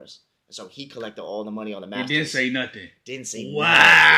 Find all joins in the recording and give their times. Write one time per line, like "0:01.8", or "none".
none